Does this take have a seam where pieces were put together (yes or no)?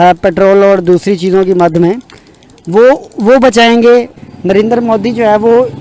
yes